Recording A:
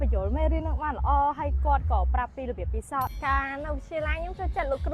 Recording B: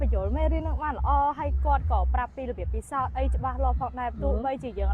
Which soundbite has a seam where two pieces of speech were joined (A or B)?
A